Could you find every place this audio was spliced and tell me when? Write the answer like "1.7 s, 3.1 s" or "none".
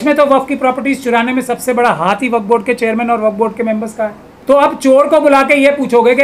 4.3 s